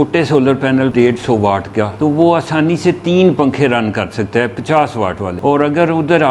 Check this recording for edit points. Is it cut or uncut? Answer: cut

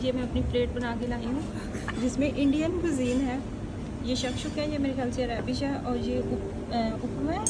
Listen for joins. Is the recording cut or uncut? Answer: uncut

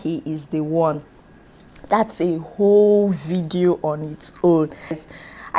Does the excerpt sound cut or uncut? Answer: uncut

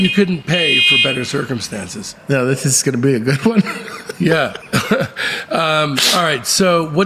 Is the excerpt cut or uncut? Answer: cut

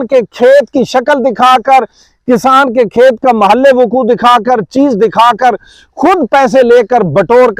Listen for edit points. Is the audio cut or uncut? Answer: uncut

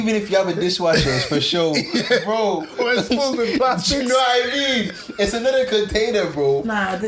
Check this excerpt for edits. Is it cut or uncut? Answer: uncut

